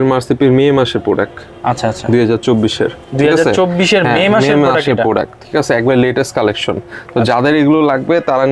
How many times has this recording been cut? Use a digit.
0